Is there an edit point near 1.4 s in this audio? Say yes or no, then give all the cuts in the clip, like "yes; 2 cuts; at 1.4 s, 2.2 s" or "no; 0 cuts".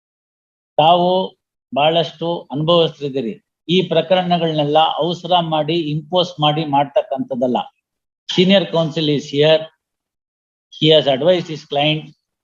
no; 0 cuts